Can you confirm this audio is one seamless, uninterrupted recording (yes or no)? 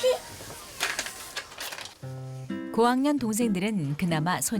yes